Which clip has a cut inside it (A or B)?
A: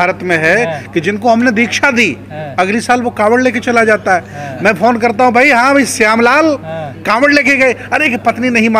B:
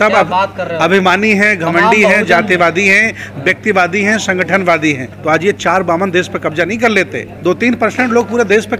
B